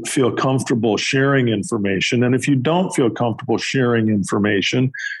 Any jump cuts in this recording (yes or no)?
no